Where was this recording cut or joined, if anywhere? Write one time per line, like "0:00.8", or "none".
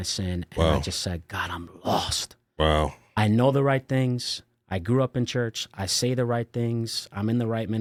none